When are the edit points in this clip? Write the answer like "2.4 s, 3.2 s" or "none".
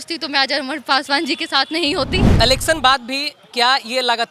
2.3 s